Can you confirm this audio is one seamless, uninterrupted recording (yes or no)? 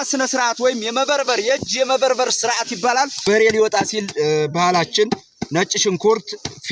no